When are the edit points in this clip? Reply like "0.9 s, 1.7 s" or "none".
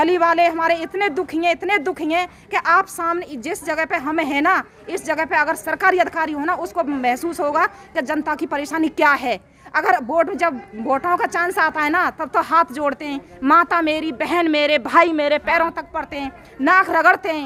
none